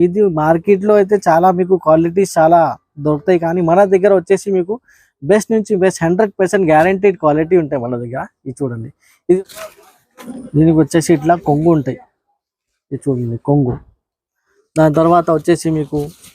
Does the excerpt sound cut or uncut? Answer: cut